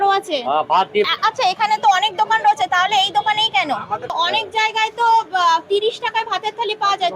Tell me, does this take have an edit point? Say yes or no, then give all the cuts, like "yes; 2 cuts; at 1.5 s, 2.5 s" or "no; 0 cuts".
yes; 2 cuts; at 1.1 s, 4.1 s